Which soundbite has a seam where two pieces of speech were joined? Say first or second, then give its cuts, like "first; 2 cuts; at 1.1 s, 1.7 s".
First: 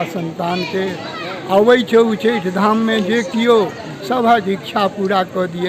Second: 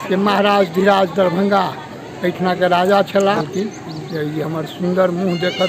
second; 1 cut; at 3.4 s